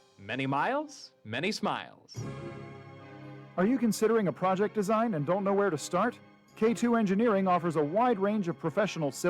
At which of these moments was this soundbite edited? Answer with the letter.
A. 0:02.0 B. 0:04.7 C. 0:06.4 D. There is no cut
A